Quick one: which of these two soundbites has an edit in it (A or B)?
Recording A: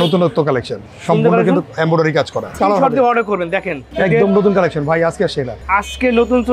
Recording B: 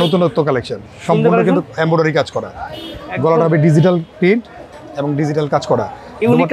A